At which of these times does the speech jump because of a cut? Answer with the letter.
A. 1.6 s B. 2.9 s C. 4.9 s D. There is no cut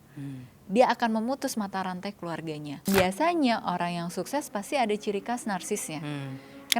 B